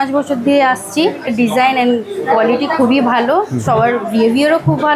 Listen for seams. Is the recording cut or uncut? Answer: cut